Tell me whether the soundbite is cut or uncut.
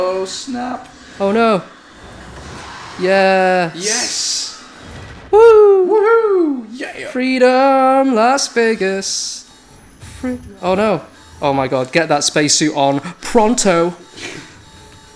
uncut